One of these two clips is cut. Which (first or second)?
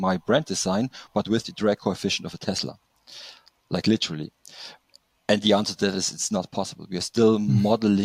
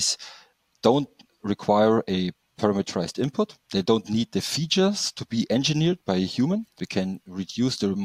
second